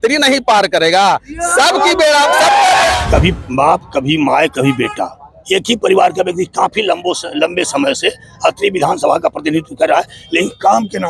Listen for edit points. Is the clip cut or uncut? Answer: cut